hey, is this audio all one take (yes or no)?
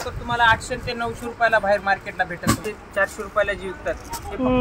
no